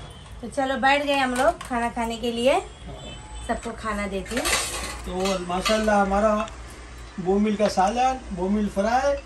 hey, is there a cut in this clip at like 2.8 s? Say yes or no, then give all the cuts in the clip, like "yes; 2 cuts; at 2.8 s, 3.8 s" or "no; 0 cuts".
no; 0 cuts